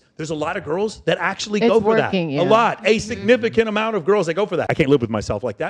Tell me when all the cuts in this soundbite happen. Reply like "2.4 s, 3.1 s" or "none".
4.7 s